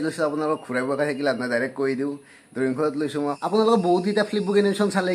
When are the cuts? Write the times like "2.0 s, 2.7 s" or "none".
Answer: 3.4 s